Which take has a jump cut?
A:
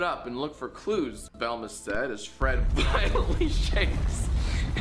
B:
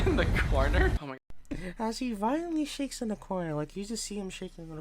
B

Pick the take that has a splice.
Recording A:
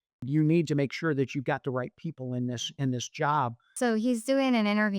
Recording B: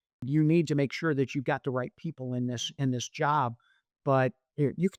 A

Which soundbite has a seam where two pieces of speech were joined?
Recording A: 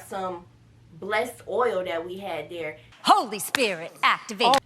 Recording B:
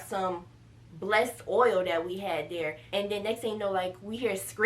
B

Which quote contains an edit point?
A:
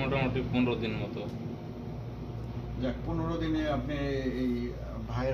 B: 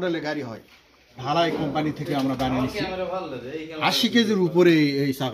B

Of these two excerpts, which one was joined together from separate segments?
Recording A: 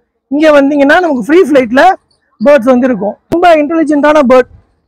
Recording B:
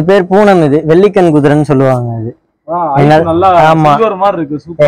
A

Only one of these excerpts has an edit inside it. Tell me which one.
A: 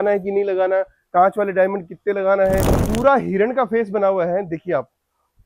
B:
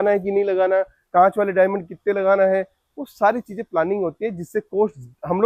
A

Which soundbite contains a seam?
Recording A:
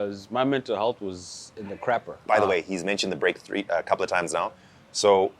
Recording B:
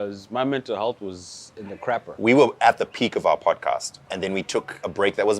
B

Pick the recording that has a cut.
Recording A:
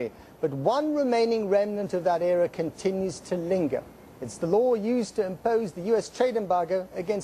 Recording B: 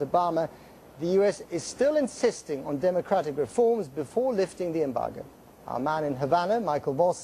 B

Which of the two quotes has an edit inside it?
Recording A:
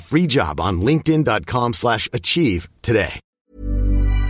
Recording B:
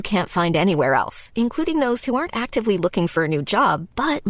A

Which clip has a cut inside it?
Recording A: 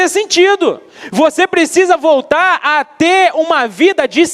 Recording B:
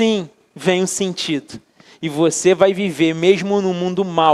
A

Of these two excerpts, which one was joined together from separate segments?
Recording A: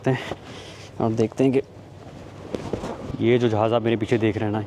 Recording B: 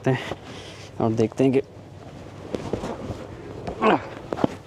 A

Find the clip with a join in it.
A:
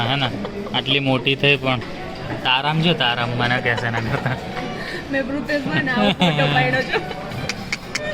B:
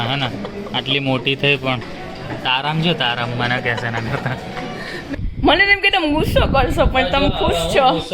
B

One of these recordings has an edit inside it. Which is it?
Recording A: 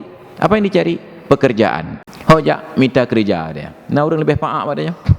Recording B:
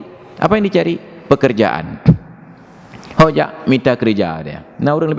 A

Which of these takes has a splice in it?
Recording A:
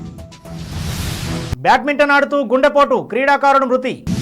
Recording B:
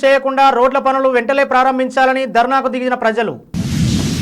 A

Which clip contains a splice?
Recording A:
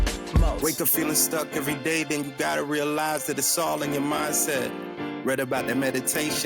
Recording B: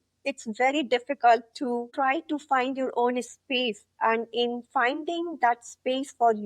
B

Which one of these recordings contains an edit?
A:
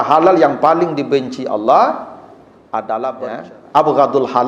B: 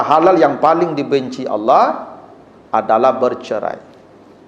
A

